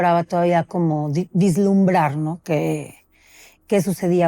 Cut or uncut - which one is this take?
uncut